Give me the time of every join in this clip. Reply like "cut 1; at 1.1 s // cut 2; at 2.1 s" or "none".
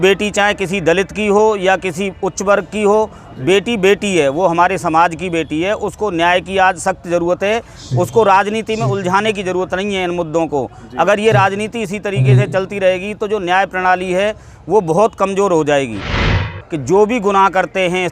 cut 1; at 16.3 s